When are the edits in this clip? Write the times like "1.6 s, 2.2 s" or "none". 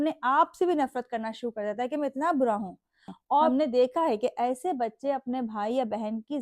3.1 s